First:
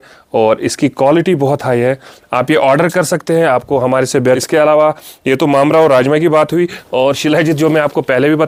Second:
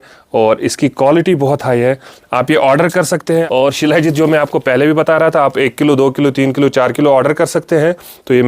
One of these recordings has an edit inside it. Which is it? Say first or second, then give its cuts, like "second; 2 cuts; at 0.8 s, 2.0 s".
second; 1 cut; at 3.4 s